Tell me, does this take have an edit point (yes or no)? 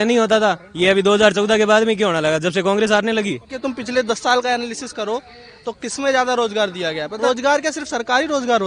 yes